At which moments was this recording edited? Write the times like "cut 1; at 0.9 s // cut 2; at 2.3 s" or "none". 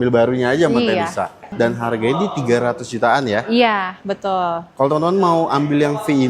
cut 1; at 1.5 s